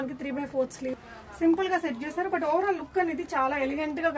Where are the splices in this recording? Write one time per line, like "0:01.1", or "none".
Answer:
0:01.0